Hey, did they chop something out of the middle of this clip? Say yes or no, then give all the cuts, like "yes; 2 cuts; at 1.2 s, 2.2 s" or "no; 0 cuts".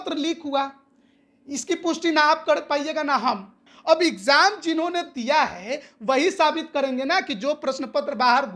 yes; 1 cut; at 3.5 s